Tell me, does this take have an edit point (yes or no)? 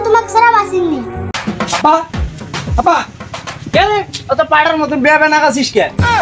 yes